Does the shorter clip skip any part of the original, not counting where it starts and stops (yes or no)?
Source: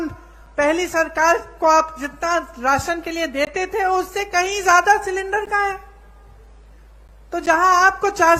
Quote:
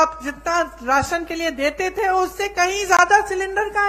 no